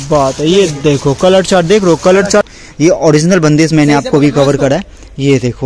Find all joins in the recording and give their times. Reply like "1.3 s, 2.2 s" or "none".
2.5 s